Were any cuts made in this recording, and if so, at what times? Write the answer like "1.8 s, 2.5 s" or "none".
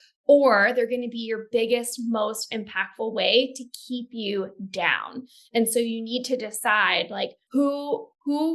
7.4 s

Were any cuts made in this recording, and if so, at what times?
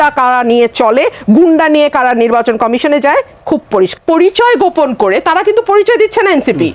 4.0 s

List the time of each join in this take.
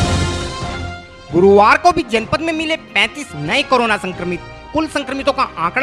none

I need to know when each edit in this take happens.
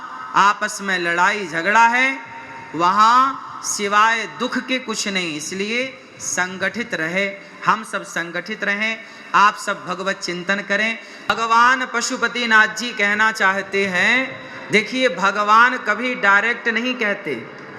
11.3 s

